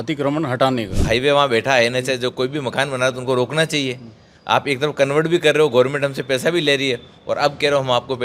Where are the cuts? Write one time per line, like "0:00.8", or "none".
0:01.0